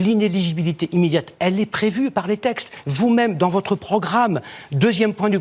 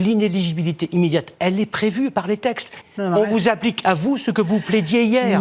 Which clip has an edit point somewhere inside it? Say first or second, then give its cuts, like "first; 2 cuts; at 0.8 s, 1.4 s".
second; 1 cut; at 2.8 s